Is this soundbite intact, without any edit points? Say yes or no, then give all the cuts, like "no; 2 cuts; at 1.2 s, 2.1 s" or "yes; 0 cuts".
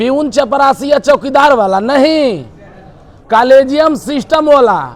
yes; 0 cuts